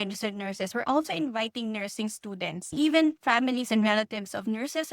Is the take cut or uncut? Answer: cut